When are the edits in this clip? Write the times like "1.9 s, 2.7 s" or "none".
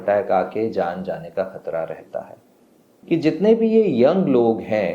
2.9 s